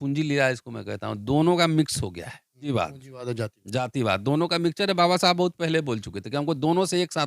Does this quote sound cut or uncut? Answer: cut